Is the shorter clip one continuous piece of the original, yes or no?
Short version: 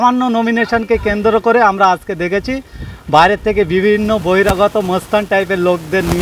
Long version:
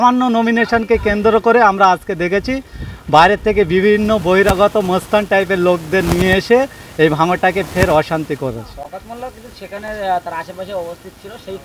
yes